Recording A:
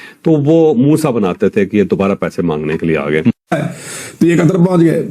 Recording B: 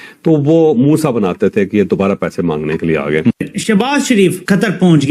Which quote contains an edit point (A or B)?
A